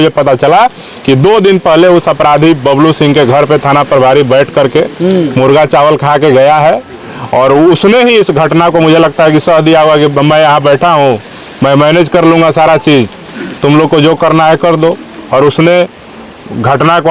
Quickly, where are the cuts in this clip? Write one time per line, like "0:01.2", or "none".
none